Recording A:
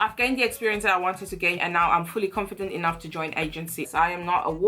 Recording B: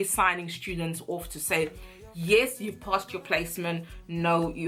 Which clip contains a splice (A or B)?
A